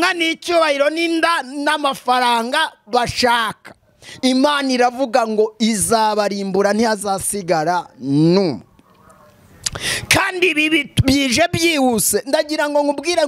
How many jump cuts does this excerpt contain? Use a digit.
0